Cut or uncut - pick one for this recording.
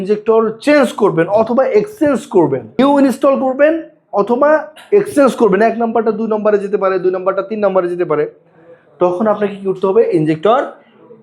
cut